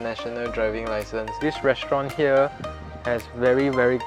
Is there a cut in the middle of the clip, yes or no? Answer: yes